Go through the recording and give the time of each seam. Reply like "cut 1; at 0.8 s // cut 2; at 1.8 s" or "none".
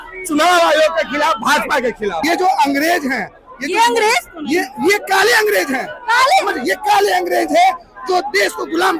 cut 1; at 2.2 s